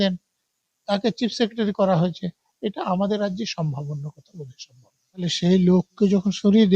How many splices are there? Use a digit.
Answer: 1